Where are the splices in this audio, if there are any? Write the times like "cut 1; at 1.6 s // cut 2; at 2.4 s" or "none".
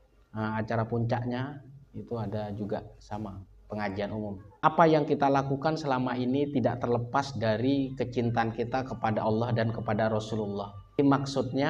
cut 1; at 4.4 s // cut 2; at 11.0 s